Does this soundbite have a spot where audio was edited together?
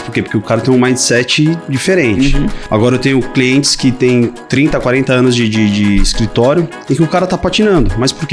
yes; 2 cuts; at 2.6 s, 6.8 s

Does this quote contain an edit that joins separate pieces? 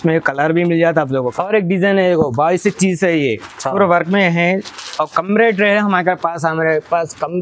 yes; 1 cut; at 1.3 s

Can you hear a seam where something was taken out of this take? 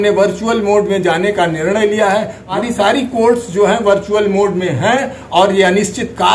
yes; 1 cut; at 2.6 s

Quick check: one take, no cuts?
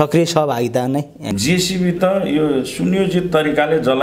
no; 1 cut; at 1.2 s

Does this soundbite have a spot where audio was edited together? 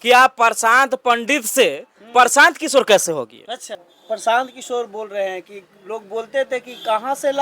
yes; 1 cut; at 3.8 s

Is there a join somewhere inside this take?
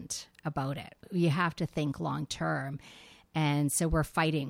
yes; 1 cut; at 1.1 s

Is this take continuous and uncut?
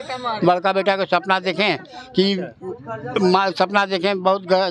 yes; 0 cuts

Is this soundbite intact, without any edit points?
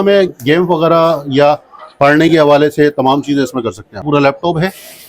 no; 1 cut; at 4.0 s

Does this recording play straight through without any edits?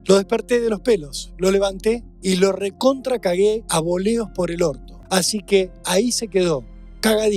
no; 3 cuts; at 2.1 s, 3.6 s, 4.9 s

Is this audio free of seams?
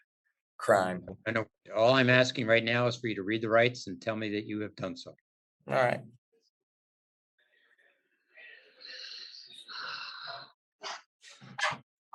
yes; 0 cuts

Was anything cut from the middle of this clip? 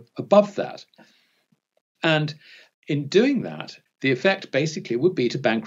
yes; 1 cut; at 3.7 s

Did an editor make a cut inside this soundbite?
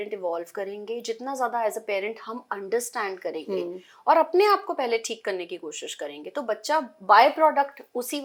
no; 0 cuts

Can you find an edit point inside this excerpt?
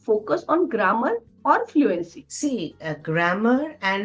no; 0 cuts

